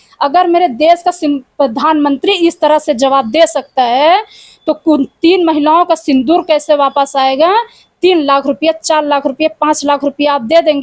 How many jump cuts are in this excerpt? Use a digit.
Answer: 0